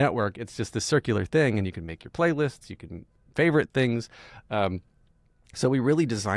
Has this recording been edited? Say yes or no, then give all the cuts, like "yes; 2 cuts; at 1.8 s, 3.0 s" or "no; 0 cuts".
no; 0 cuts